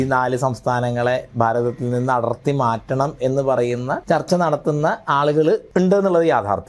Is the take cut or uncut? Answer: cut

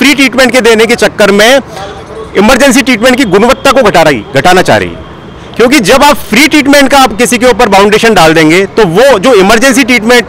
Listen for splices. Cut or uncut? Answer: uncut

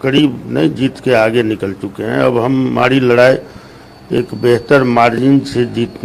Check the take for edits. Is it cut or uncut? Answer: uncut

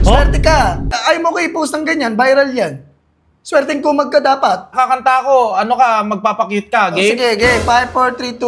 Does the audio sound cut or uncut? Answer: cut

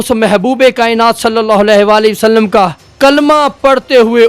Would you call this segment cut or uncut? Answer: cut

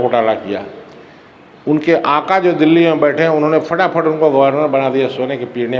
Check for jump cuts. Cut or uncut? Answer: uncut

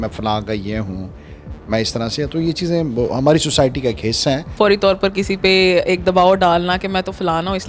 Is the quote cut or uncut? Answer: cut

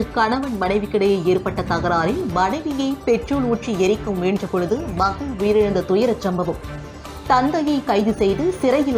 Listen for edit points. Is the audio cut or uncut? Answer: uncut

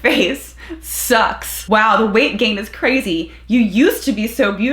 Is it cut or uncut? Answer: cut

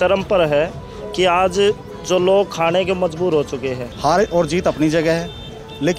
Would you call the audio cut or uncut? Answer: cut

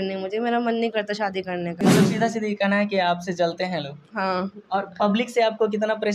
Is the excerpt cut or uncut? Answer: cut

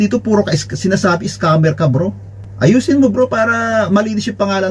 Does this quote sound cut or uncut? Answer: uncut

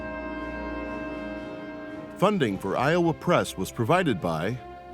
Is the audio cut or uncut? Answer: cut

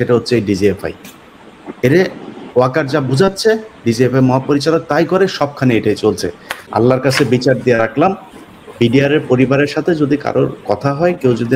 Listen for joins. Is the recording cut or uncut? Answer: cut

